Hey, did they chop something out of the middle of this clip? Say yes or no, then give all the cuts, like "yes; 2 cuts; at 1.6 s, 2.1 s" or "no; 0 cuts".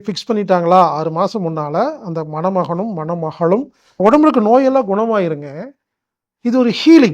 yes; 1 cut; at 4.0 s